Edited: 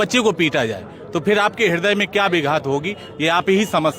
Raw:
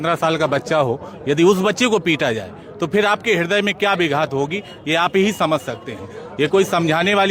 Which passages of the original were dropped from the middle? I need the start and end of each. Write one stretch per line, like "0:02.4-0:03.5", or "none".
none